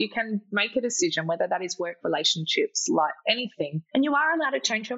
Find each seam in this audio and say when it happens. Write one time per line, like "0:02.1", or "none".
0:03.8